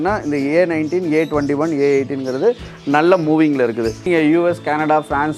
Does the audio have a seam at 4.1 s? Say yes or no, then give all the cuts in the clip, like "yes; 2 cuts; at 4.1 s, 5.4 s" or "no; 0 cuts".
yes; 1 cut; at 4.1 s